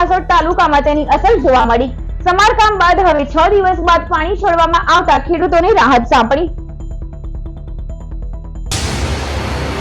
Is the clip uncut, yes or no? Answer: no